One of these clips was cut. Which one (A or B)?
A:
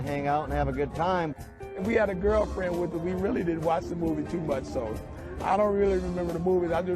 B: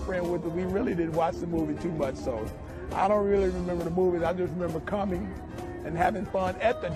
A